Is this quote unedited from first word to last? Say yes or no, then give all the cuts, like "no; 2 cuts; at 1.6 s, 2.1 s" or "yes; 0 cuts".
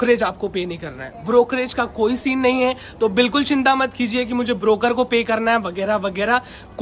yes; 0 cuts